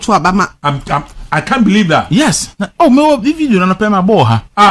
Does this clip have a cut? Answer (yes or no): no